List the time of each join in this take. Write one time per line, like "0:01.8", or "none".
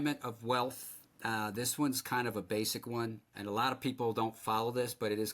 0:03.3